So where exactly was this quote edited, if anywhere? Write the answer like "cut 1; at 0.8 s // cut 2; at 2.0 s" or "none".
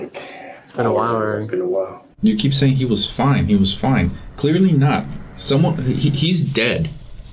cut 1; at 2.0 s